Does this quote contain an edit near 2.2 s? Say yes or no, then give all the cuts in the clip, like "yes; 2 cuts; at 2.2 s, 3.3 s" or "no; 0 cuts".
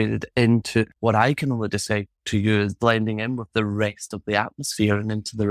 no; 1 cut; at 0.9 s